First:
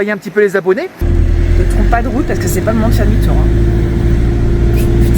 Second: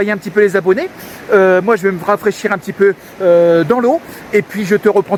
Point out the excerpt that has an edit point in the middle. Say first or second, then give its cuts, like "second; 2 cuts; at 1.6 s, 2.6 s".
first; 1 cut; at 1.0 s